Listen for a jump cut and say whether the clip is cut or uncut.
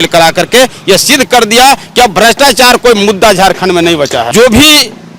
cut